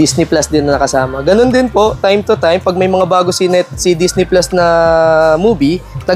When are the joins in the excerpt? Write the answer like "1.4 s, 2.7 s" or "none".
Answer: none